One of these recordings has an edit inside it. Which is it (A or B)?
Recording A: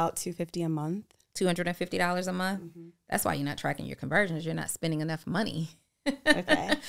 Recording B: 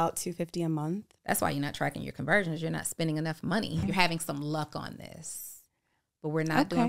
B